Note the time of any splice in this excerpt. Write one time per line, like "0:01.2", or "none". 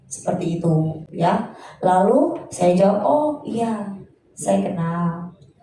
none